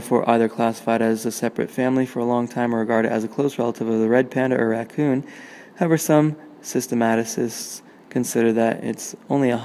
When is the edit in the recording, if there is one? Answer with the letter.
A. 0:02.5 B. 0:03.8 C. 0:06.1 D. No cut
C